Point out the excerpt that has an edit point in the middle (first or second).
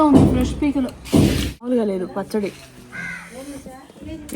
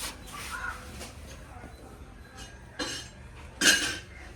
first